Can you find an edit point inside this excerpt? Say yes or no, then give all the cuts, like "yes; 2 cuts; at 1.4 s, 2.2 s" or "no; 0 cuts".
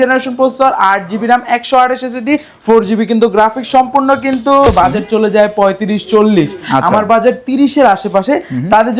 yes; 1 cut; at 4.7 s